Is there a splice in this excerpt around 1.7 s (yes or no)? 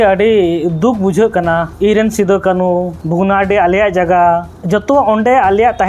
yes